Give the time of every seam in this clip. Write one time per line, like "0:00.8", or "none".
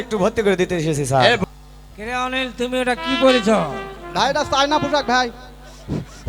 0:01.4